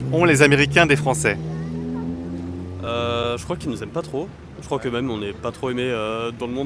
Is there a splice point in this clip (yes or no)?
no